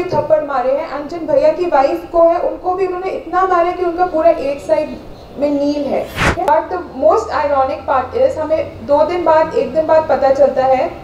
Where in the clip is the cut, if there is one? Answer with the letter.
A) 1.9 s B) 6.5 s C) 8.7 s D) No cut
B